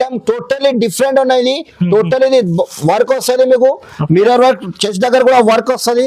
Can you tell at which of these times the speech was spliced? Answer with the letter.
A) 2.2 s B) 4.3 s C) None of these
C